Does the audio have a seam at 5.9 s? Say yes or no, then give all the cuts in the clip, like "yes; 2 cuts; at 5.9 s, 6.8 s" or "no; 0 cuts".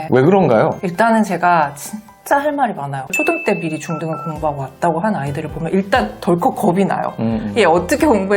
no; 2 cuts; at 0.8 s, 3.1 s